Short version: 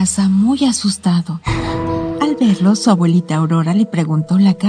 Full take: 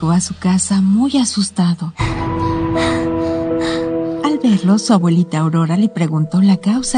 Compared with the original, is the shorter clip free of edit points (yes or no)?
no